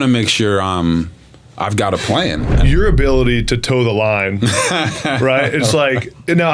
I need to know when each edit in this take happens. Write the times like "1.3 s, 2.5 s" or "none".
2.5 s